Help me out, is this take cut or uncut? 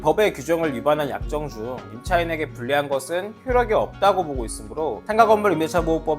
uncut